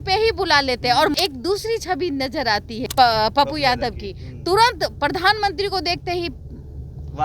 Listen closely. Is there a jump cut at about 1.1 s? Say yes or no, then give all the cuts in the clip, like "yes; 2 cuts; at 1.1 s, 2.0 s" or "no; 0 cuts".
yes; 2 cuts; at 1.1 s, 2.8 s